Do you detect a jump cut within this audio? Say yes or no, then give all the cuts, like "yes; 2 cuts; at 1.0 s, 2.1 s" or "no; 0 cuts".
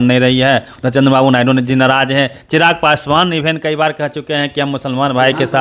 no; 0 cuts